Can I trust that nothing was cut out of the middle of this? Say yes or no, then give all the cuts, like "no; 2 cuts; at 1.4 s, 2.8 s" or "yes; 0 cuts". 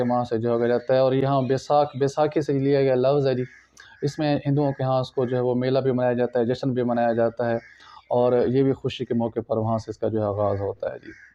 yes; 0 cuts